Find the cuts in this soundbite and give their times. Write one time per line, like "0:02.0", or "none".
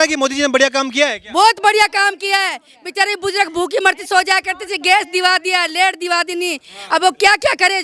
none